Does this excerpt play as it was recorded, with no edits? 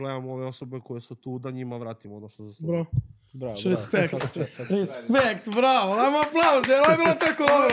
yes; 0 cuts

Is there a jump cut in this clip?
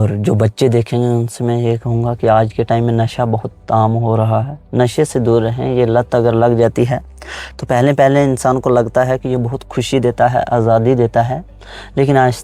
no; 0 cuts

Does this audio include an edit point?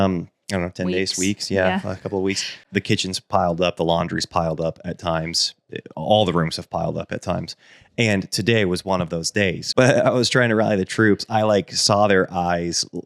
yes; 2 cuts; at 2.6 s, 9.6 s

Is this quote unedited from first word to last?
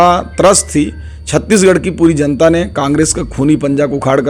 yes; 0 cuts

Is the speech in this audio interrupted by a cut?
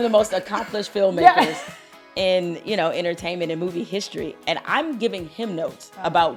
no; 0 cuts

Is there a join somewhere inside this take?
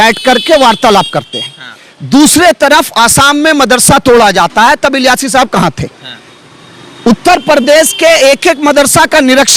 no; 0 cuts

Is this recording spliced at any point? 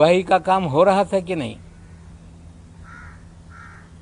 no; 0 cuts

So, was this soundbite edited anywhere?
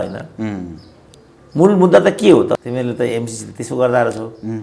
yes; 1 cut; at 2.6 s

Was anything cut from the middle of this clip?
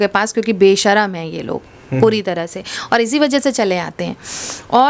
no; 0 cuts

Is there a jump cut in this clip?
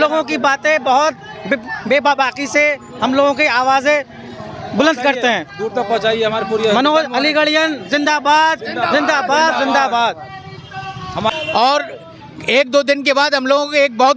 yes; 1 cut; at 11.3 s

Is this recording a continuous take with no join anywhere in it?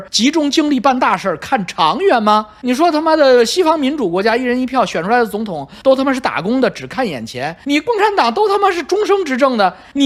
yes; 0 cuts

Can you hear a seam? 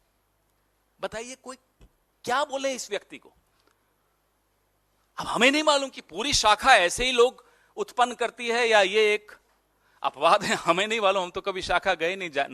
no; 0 cuts

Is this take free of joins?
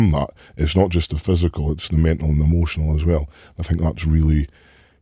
yes; 0 cuts

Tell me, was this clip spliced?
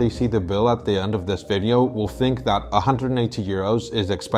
no; 0 cuts

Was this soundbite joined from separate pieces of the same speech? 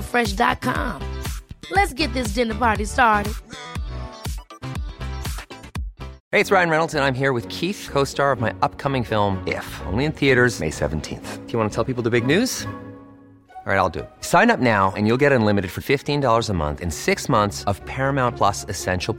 yes; 1 cut; at 6.2 s

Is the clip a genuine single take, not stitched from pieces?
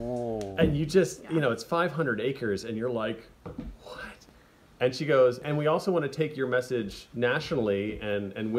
no; 3 cuts; at 4.1 s, 5.4 s, 7.0 s

